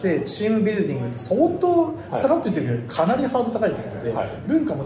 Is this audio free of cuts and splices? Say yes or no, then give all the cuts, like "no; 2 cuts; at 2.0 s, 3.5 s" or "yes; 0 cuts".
yes; 0 cuts